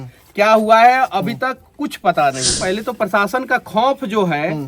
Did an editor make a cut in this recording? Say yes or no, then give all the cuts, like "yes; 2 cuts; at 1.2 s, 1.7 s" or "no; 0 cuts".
yes; 1 cut; at 2.5 s